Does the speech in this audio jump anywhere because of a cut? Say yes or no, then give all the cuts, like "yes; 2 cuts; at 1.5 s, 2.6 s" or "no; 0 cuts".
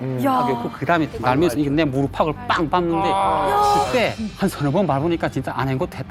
no; 0 cuts